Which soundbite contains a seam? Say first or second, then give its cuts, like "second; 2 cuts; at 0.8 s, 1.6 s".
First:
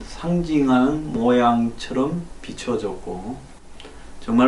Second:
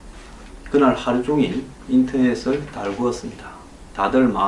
second; 1 cut; at 2.1 s